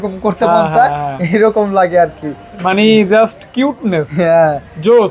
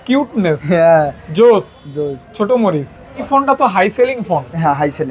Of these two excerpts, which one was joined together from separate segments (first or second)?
second